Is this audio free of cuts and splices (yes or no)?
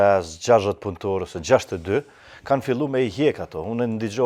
yes